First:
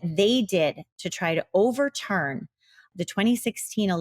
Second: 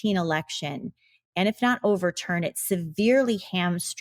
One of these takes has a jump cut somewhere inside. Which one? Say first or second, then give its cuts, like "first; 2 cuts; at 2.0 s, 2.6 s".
first; 1 cut; at 2.8 s